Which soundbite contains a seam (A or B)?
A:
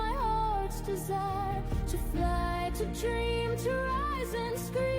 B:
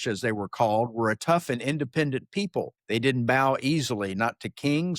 B